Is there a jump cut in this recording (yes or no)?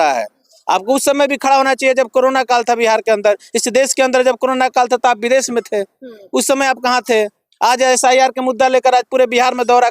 no